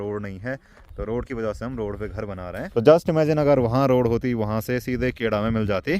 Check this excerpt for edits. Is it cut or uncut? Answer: uncut